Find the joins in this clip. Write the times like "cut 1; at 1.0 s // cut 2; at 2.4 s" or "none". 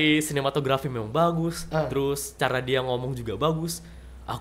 none